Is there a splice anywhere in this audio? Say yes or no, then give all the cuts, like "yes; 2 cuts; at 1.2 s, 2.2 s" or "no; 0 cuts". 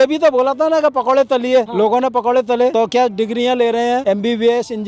yes; 3 cuts; at 1.7 s, 2.7 s, 4.0 s